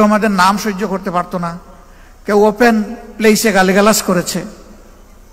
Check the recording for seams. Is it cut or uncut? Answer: uncut